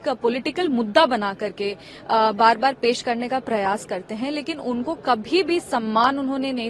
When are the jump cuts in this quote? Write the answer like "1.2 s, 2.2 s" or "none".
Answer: none